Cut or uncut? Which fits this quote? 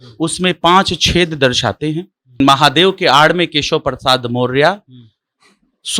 cut